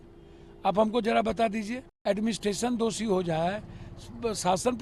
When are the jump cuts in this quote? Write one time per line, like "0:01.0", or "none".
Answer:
0:01.8